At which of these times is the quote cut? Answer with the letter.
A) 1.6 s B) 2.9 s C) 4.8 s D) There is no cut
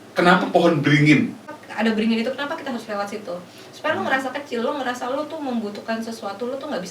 A